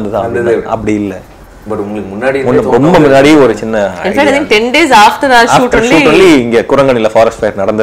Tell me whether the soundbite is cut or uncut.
uncut